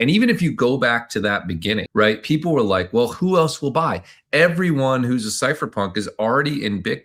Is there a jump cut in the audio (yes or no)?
no